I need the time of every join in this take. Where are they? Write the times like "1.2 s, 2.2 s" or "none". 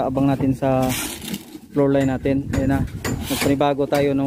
3.2 s